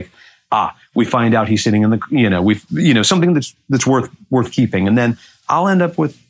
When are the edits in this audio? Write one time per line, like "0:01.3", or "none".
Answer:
none